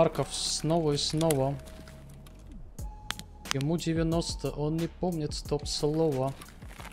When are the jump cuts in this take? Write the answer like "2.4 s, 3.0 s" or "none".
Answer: none